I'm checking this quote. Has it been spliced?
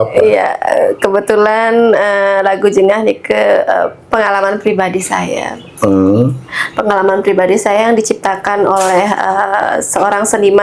no; 0 cuts

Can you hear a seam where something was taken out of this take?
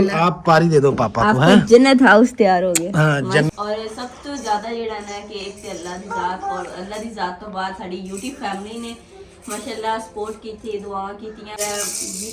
yes; 2 cuts; at 3.5 s, 11.6 s

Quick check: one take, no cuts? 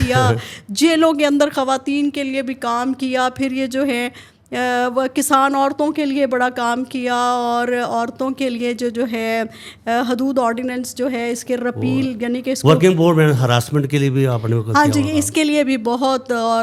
yes; 0 cuts

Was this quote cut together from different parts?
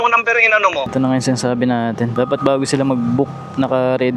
yes; 1 cut; at 0.9 s

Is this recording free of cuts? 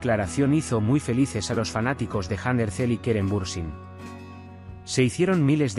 no; 2 cuts; at 3.7 s, 4.9 s

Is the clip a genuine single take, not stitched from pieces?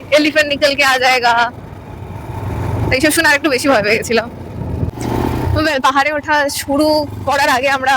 no; 1 cut; at 5.0 s

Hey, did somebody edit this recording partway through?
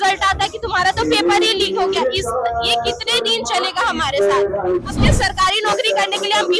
yes; 1 cut; at 4.9 s

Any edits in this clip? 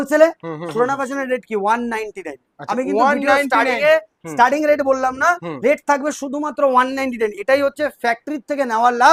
no; 0 cuts

